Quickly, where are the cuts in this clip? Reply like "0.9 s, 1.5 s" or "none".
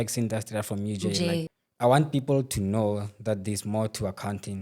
1.5 s